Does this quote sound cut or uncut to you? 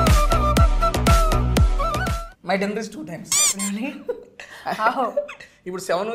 cut